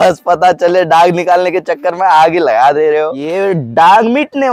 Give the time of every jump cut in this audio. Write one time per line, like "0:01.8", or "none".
0:03.2